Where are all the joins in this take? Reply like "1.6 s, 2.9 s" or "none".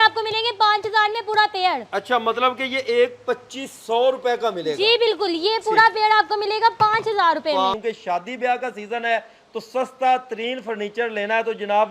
7.7 s